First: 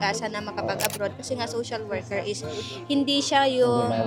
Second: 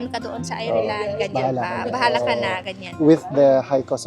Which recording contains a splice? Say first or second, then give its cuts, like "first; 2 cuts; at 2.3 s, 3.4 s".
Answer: second; 1 cut; at 2.8 s